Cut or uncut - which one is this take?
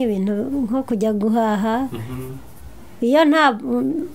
uncut